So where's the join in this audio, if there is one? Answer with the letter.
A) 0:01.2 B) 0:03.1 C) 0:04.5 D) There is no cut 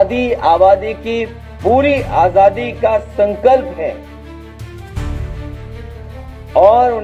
D